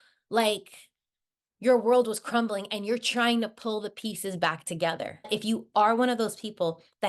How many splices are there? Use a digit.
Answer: 1